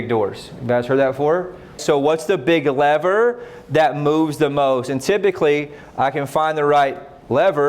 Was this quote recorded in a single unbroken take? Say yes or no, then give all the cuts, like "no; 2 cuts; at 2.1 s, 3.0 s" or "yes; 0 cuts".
no; 1 cut; at 1.8 s